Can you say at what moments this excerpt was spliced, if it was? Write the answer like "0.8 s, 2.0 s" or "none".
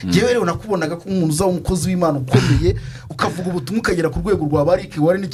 none